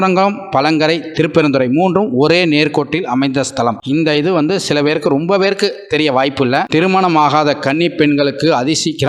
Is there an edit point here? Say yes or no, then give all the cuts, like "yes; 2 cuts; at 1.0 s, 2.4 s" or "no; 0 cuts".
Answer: yes; 2 cuts; at 3.8 s, 6.7 s